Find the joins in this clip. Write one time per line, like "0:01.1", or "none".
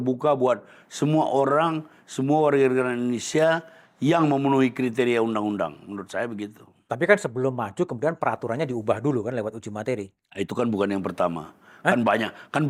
none